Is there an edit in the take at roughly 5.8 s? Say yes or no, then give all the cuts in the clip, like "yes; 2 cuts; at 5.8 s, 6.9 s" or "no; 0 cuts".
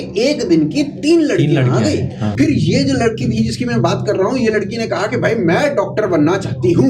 no; 1 cut; at 2.2 s